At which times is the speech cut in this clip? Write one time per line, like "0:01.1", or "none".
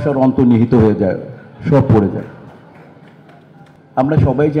none

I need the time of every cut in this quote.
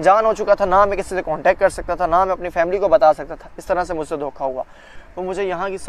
0:04.8

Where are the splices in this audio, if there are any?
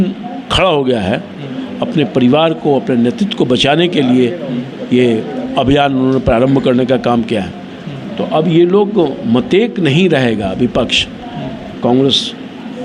none

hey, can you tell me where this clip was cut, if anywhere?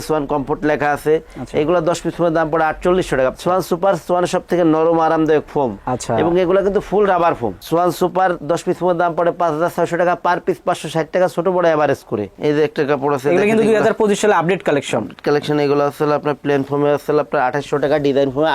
0:03.3
0:07.5
0:12.3

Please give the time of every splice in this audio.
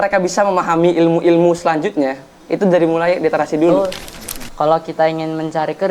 0:03.7

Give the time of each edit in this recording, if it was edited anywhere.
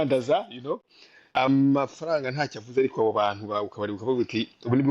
0:01.4

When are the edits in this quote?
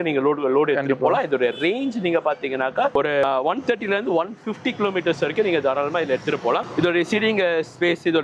none

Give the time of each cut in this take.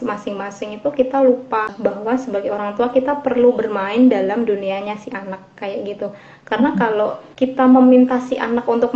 0:01.7
0:07.2

